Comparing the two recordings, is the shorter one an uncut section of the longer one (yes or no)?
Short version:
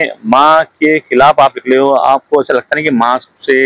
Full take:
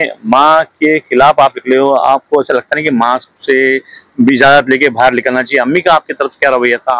yes